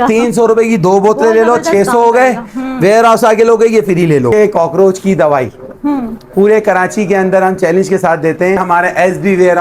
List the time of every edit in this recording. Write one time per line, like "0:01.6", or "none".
0:04.3
0:08.6